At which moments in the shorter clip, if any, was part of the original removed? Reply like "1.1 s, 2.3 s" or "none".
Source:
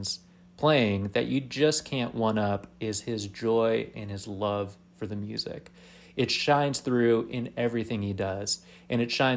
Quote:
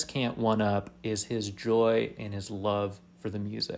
none